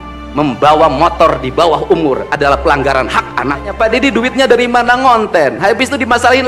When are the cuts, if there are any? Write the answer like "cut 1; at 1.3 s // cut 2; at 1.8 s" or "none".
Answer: cut 1; at 3.7 s